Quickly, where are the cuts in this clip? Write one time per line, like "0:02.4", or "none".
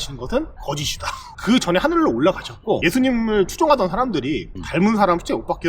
0:01.2